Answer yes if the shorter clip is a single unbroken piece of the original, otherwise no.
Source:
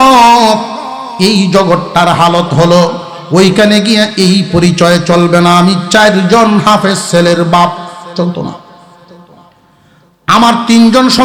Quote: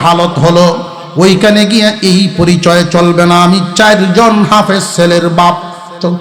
yes